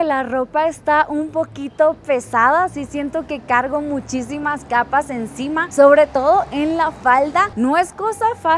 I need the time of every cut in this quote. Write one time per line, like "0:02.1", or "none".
none